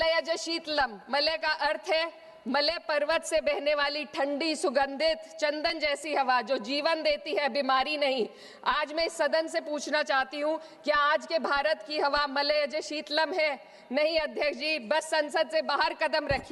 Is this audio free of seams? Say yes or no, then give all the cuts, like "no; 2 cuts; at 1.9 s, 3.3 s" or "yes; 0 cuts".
yes; 0 cuts